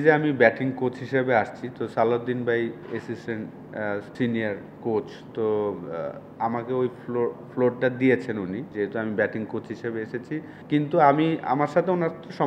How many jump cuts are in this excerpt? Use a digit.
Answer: 3